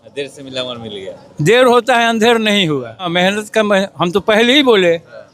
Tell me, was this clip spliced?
yes; 1 cut; at 3.1 s

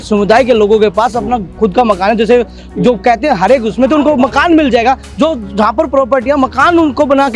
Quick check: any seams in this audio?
no; 0 cuts

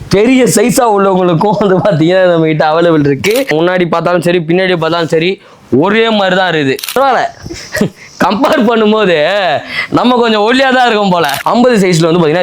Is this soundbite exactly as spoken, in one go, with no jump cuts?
no; 3 cuts; at 3.5 s, 6.9 s, 11.4 s

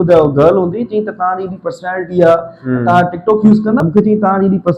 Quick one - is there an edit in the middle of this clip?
yes; 1 cut; at 3.8 s

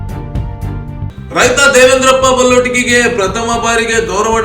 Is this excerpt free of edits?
yes; 0 cuts

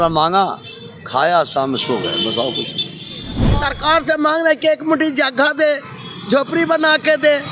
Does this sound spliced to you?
yes; 1 cut; at 3.4 s

